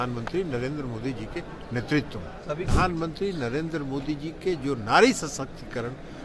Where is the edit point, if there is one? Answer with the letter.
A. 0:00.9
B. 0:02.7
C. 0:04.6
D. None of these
B